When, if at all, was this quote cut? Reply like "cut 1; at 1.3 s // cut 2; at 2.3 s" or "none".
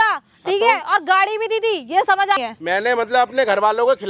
cut 1; at 2.4 s